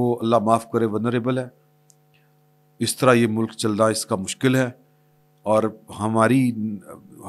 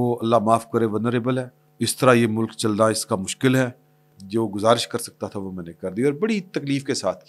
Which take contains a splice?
second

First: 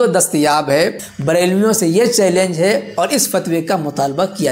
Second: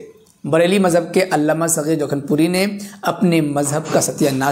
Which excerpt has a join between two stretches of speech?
first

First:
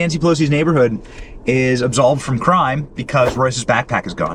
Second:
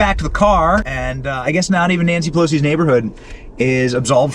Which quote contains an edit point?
second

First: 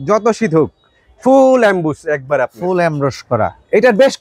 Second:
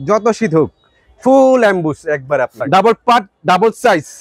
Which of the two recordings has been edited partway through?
second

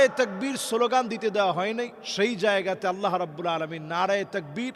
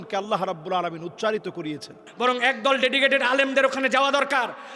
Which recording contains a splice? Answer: second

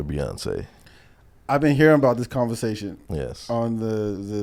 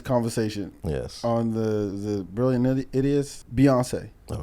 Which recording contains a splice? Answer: second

